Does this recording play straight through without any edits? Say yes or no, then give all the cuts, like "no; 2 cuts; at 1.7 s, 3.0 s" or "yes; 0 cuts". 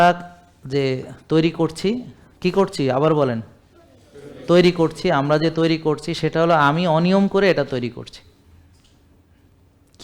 yes; 0 cuts